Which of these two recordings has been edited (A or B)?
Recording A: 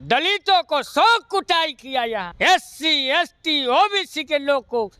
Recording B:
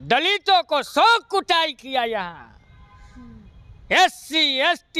A